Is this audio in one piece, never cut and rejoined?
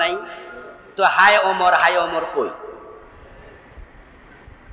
yes; 0 cuts

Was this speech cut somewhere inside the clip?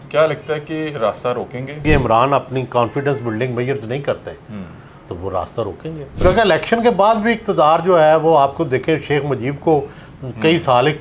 yes; 2 cuts; at 1.8 s, 6.2 s

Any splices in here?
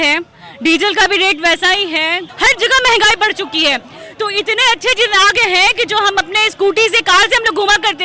yes; 1 cut; at 2.2 s

